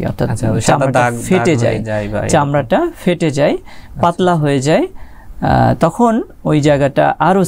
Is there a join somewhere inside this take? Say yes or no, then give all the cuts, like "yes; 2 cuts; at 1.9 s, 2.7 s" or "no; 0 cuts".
no; 0 cuts